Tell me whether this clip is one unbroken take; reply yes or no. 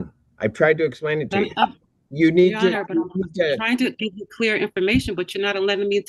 yes